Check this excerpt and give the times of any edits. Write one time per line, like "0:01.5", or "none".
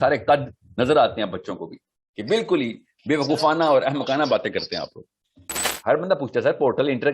0:05.7